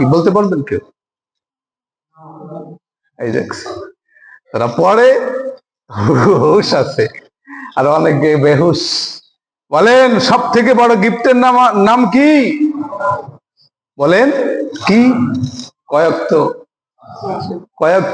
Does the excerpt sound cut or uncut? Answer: uncut